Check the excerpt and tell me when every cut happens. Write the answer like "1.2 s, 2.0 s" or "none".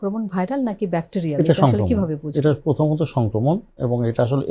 none